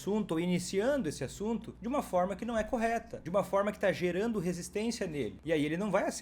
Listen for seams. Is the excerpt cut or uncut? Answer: cut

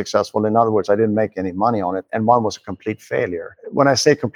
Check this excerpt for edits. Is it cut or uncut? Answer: uncut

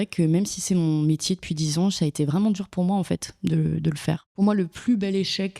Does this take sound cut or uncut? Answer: cut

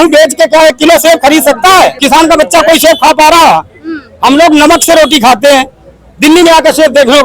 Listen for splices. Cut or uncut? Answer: cut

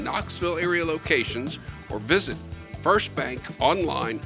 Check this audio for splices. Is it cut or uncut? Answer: uncut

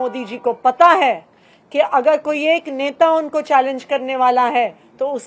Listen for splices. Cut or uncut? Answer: uncut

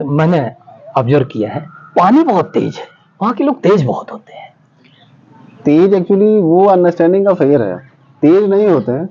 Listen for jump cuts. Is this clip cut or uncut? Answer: uncut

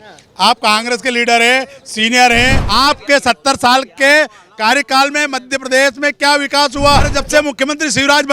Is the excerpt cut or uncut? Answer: cut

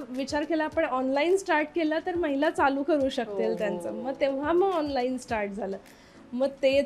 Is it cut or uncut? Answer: uncut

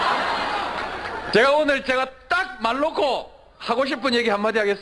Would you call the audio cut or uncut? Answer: uncut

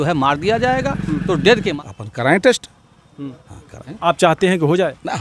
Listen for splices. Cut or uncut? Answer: cut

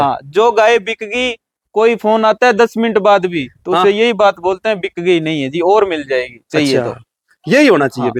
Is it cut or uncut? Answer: uncut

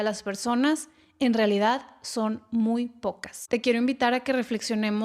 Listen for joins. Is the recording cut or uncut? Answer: cut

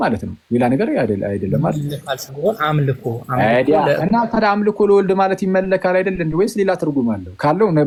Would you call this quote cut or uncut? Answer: uncut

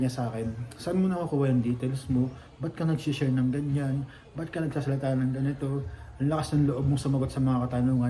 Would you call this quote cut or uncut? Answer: uncut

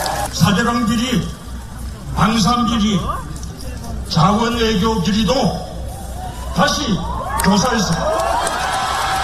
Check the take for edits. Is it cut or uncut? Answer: uncut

